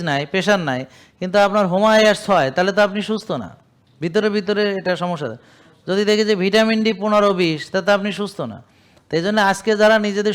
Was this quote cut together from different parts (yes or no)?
no